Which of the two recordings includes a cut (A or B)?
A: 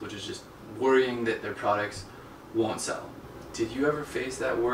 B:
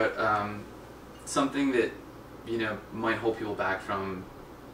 A